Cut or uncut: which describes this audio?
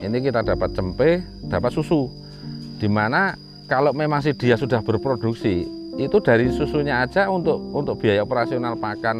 cut